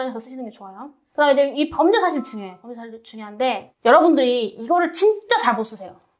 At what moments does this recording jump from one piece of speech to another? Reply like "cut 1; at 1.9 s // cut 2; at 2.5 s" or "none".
cut 1; at 1.0 s // cut 2; at 3.7 s